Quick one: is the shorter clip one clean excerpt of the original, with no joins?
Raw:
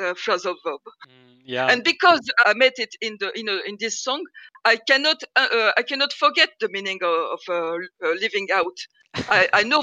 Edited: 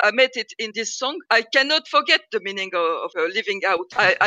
no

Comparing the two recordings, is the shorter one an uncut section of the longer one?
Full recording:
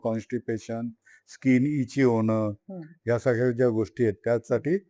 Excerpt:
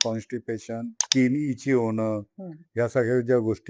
no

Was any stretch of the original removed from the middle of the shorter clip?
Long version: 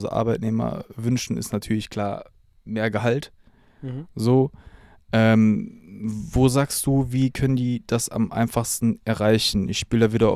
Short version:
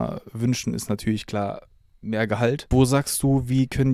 yes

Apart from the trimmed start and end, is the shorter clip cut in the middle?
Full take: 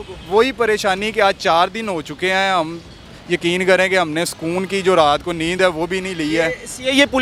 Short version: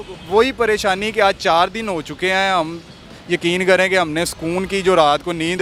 no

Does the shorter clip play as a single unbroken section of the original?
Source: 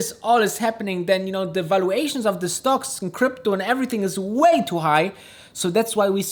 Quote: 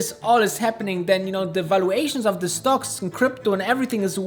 yes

